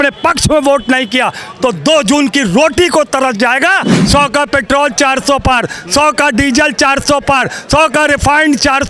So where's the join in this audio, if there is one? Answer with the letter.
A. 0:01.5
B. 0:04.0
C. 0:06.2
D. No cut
B